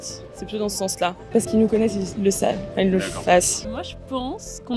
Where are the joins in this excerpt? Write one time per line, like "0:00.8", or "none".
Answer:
0:01.3
0:03.6